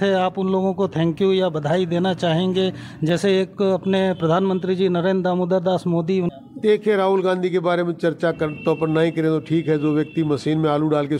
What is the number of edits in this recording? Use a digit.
1